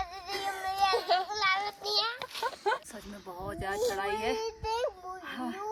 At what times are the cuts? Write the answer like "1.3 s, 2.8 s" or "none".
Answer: none